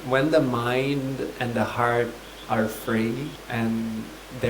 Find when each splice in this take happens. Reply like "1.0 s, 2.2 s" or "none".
3.4 s